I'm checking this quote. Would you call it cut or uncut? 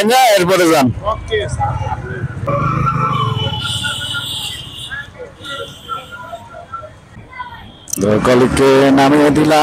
cut